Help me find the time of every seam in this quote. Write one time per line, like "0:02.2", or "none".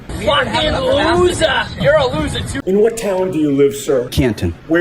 0:02.5